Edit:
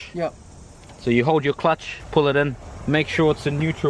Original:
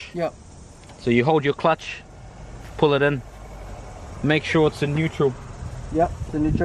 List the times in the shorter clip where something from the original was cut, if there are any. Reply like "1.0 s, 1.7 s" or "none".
1.9 s, 2.7 s